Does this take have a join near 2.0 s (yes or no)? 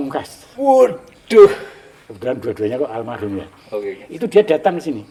no